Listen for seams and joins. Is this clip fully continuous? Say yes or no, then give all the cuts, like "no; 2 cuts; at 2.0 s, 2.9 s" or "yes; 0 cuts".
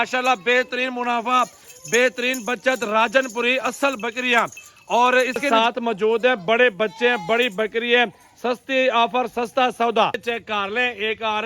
no; 2 cuts; at 5.4 s, 10.2 s